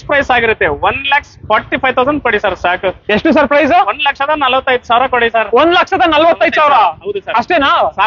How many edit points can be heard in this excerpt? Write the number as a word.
zero